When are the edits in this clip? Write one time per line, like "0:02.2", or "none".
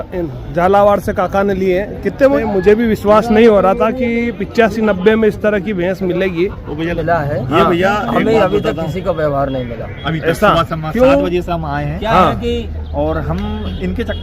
0:02.4
0:07.0